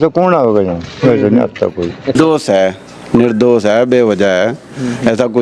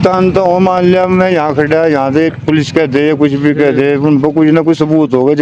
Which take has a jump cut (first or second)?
first